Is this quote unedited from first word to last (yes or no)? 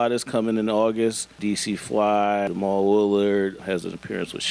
no